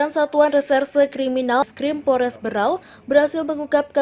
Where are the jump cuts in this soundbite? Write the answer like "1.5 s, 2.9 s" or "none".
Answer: 1.7 s